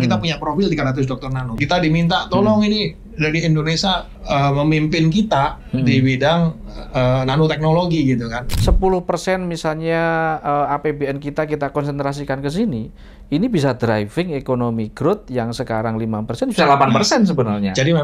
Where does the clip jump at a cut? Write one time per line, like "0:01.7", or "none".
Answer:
0:01.5
0:04.1
0:08.4